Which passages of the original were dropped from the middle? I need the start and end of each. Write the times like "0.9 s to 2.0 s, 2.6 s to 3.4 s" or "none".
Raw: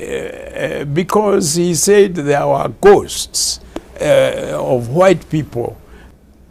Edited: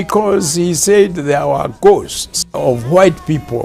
3.5 s to 4.5 s